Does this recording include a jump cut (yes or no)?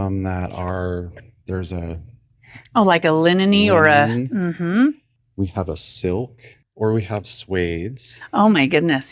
yes